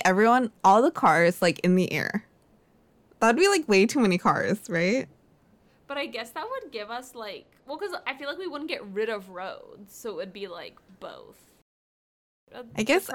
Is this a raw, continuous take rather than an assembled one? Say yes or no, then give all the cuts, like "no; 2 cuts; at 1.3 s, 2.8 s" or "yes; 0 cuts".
no; 1 cut; at 11.8 s